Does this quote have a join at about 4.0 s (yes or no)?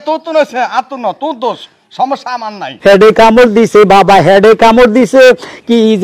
no